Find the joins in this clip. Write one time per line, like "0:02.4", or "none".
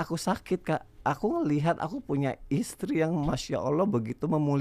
0:00.9